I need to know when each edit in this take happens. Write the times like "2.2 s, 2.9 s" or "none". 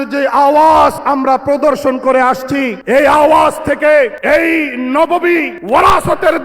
1.0 s, 2.8 s, 4.2 s, 5.5 s